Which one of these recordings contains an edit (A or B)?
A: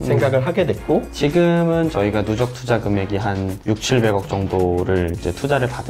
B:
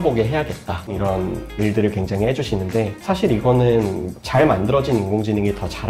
A